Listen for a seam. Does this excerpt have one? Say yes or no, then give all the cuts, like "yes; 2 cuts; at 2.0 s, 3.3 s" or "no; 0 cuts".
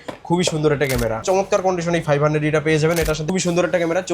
yes; 2 cuts; at 1.2 s, 3.3 s